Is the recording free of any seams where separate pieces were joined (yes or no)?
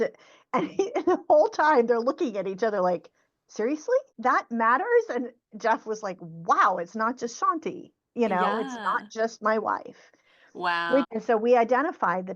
no